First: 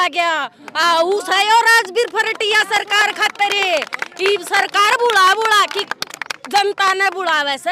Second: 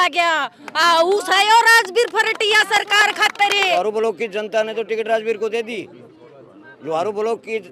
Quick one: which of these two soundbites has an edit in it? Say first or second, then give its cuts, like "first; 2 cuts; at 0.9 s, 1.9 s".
second; 1 cut; at 3.7 s